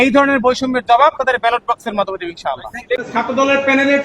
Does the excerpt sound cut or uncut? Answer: cut